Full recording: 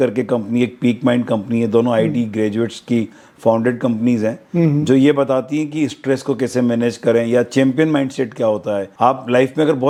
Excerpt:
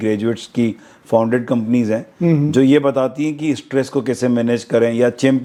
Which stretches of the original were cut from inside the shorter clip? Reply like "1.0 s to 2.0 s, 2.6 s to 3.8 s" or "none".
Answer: none